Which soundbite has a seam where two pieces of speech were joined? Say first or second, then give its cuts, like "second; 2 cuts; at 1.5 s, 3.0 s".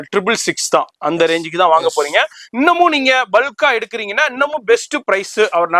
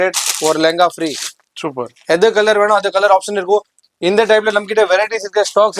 second; 1 cut; at 3.8 s